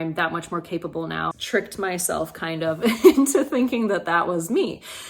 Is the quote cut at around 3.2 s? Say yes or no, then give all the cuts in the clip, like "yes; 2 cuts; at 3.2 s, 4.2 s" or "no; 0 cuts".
no; 1 cut; at 1.3 s